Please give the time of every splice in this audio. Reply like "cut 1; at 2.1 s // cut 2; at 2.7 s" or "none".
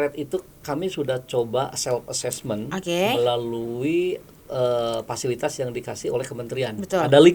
none